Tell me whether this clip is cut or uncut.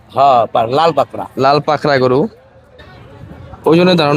cut